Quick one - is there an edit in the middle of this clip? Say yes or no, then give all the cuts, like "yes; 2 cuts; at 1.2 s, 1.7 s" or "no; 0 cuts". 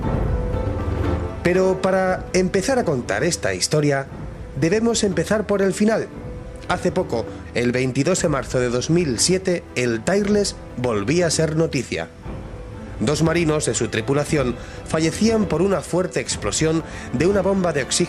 yes; 1 cut; at 9.2 s